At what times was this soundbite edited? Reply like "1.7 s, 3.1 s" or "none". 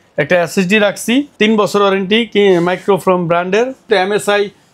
3.9 s